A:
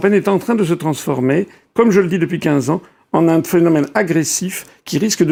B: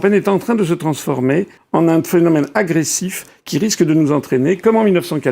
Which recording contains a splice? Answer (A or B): B